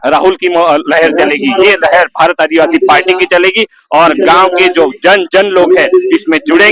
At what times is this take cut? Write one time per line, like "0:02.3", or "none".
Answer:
none